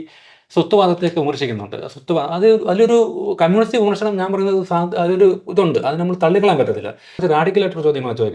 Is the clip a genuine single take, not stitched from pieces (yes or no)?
no